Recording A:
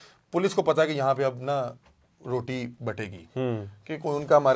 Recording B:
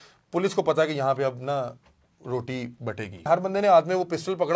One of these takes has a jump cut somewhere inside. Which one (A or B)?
B